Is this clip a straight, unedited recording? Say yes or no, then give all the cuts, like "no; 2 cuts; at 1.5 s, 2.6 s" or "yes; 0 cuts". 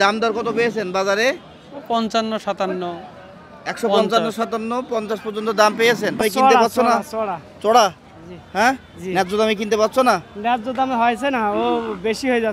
no; 1 cut; at 6.2 s